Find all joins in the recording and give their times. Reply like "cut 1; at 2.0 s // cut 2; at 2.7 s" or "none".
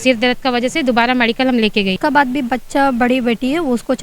cut 1; at 2.0 s

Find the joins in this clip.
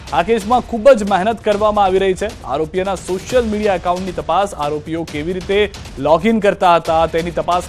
none

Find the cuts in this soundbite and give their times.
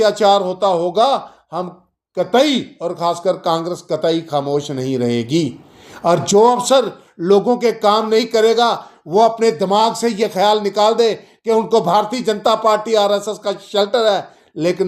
none

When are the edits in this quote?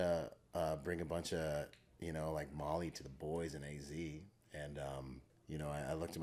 cut 1; at 5.3 s

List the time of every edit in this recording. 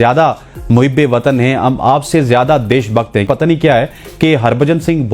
none

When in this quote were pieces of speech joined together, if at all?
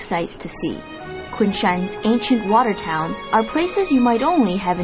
cut 1; at 1.2 s

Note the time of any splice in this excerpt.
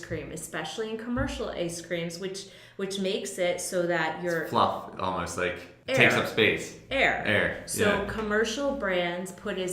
cut 1; at 5.7 s

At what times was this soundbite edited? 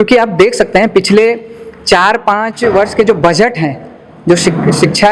none

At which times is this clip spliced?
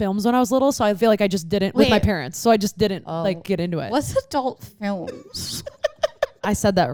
none

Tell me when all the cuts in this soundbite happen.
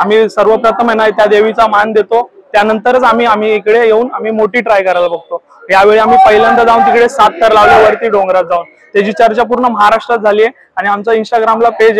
none

